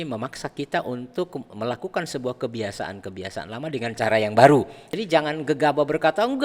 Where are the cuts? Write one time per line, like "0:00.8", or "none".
0:04.9